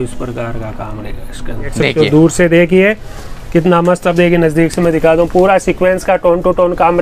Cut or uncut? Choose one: cut